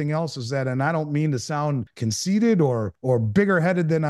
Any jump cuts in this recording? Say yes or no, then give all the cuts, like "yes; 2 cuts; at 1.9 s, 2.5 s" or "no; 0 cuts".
yes; 2 cuts; at 1.9 s, 2.9 s